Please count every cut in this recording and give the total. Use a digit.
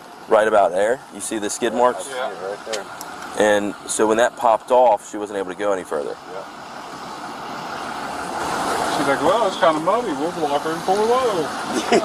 0